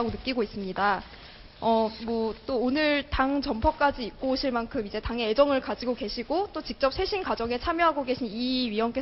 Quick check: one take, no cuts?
no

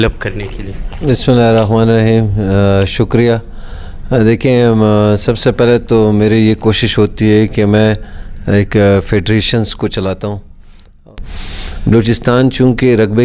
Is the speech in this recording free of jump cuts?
no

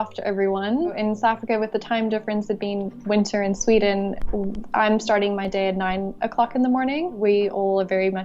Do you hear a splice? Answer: yes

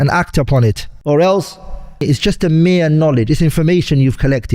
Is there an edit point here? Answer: yes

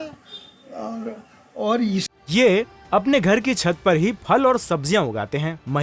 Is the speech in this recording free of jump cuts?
no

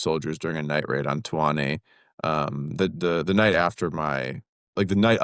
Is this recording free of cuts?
yes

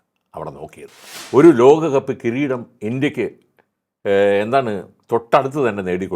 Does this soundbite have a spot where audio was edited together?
yes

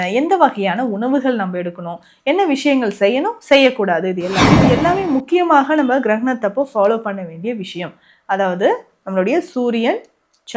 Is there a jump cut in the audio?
yes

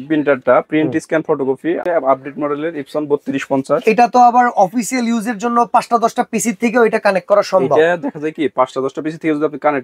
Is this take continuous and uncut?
no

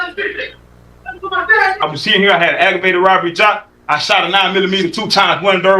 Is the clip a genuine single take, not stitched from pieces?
no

